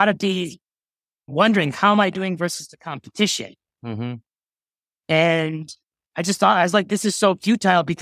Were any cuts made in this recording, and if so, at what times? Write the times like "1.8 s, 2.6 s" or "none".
1.3 s